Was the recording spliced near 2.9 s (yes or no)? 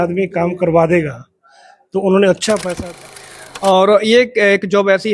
yes